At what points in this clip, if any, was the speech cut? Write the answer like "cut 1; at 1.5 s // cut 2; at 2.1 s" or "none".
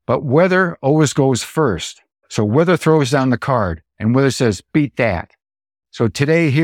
cut 1; at 2.2 s // cut 2; at 3.8 s